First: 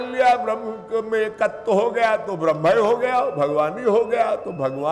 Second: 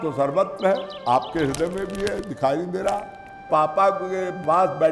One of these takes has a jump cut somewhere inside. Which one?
second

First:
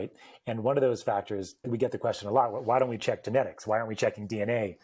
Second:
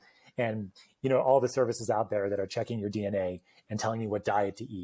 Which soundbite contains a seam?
first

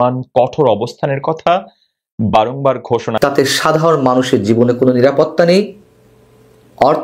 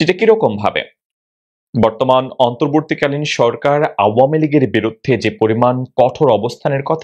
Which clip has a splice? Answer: first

